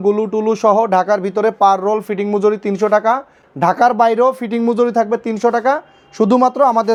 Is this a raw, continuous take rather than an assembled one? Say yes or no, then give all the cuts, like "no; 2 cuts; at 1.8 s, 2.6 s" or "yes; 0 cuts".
yes; 0 cuts